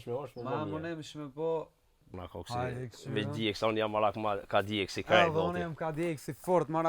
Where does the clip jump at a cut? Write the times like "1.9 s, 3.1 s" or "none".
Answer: 2.1 s